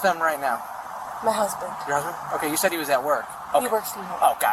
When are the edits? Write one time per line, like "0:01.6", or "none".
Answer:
0:03.4

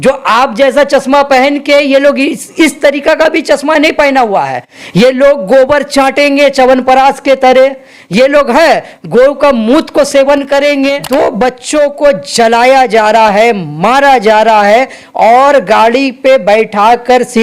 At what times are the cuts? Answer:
0:10.9

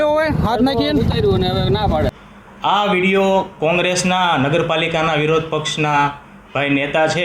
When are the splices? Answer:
0:02.2

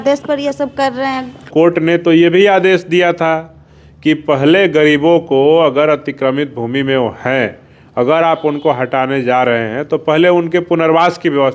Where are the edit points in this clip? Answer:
0:01.5

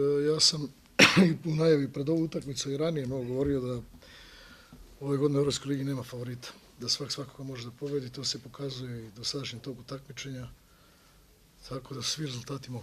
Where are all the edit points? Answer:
0:03.8

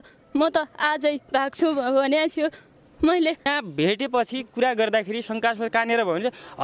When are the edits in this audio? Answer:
0:03.5

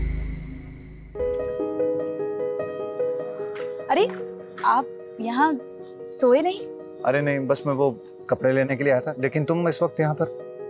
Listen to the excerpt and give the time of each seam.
0:01.1

